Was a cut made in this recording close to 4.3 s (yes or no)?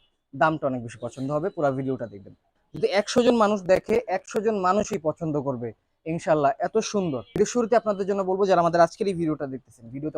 no